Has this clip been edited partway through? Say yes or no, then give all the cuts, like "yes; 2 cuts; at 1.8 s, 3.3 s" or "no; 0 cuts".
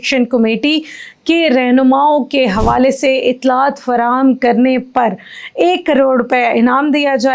no; 0 cuts